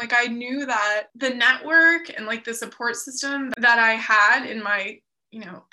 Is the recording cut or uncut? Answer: cut